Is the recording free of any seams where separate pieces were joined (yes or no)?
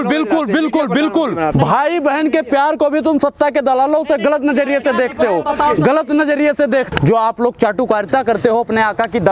no